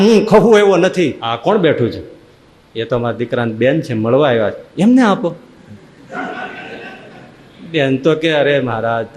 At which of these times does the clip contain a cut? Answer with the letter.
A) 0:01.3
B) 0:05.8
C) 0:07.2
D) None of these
A